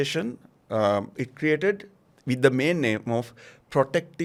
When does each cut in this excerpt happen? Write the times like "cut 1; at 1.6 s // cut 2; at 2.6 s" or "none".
none